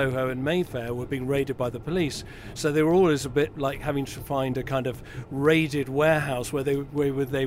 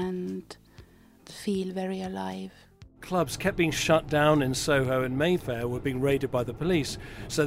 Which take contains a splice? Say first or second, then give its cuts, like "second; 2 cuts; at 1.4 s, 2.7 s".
second; 2 cuts; at 1.2 s, 3.0 s